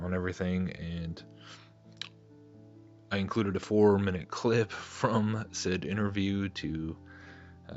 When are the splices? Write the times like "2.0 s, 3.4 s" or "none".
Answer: 6.6 s